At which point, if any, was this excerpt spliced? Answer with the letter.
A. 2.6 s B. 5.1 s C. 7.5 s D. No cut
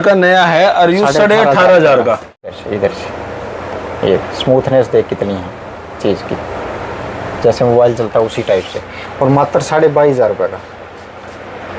A